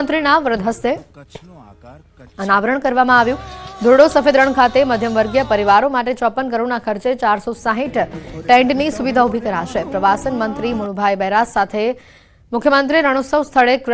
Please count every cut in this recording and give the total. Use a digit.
1